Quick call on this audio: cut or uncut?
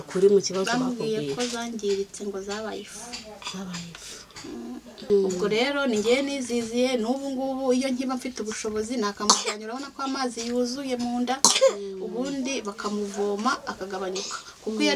cut